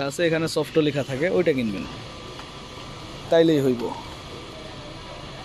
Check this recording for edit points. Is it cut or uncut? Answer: uncut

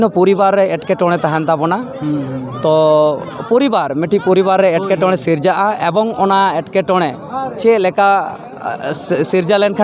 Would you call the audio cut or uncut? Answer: uncut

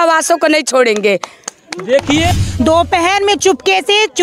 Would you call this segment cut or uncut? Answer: cut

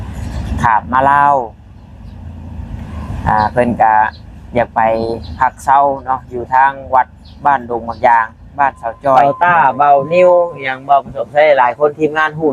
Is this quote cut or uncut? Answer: cut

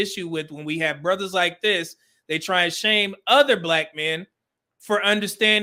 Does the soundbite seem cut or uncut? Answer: uncut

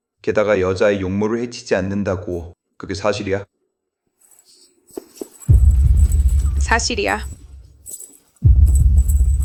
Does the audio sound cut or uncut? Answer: uncut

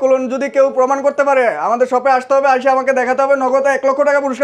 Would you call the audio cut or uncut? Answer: uncut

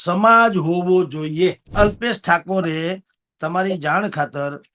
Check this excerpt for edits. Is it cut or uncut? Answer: cut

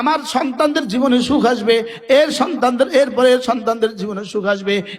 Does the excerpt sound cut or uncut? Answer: uncut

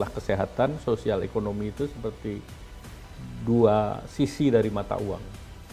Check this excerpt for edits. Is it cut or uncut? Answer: uncut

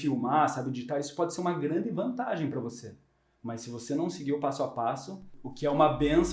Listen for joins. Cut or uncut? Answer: cut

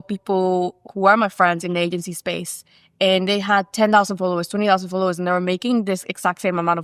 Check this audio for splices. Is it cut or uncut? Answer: uncut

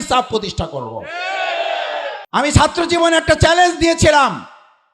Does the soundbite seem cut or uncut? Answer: cut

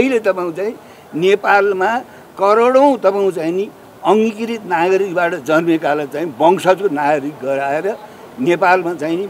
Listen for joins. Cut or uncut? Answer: uncut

